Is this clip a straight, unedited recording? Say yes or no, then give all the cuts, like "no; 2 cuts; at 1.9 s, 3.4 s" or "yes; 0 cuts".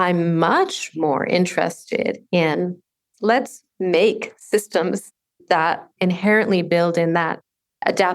no; 2 cuts; at 3.1 s, 5.7 s